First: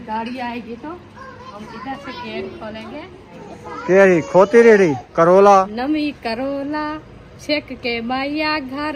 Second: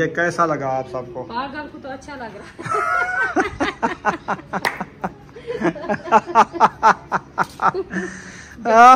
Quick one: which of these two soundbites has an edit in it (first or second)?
first